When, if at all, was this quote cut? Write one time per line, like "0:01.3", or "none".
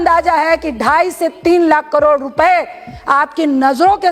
none